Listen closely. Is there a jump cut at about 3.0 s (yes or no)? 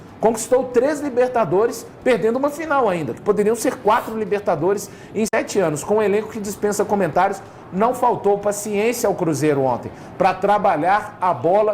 no